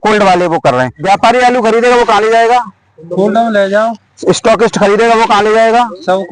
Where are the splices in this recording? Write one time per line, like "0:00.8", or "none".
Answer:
0:01.0